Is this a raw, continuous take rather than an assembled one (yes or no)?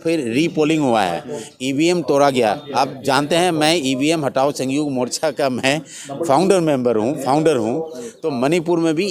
yes